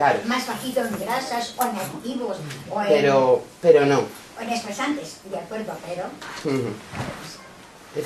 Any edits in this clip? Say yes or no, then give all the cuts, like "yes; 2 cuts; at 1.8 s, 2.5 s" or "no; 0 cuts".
no; 0 cuts